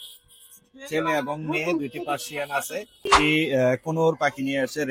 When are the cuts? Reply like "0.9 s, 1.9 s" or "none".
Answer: 3.1 s